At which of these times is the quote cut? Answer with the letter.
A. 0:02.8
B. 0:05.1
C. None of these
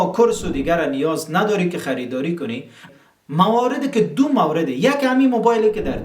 A